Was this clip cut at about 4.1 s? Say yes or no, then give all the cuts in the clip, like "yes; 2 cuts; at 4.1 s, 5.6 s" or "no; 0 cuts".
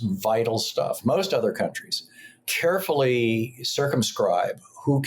no; 1 cut; at 1.0 s